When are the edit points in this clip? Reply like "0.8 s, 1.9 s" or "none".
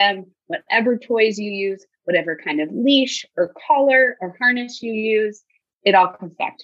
5.6 s